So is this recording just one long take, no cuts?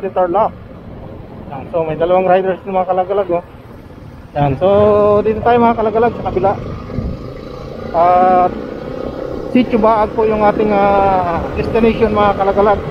yes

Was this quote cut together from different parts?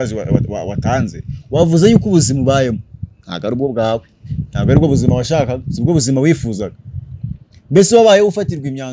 no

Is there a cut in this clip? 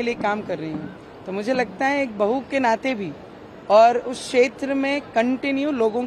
no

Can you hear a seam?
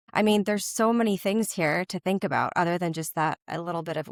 no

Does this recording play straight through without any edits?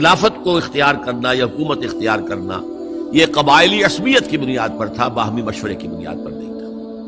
no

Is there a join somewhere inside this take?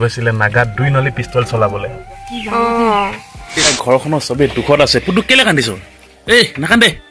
yes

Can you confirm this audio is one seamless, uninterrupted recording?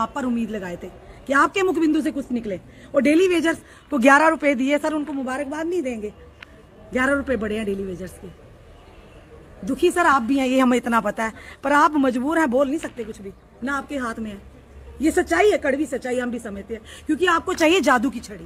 yes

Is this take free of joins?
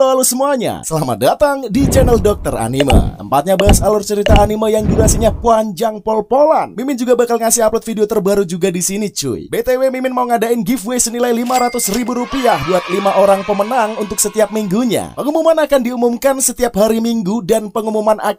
yes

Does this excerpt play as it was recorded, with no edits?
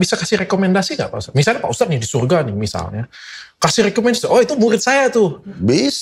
yes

